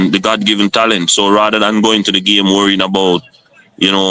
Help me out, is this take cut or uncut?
uncut